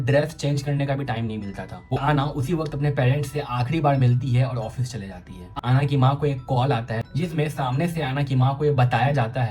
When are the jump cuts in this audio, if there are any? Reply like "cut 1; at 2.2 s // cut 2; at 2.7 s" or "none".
cut 1; at 2.0 s // cut 2; at 5.5 s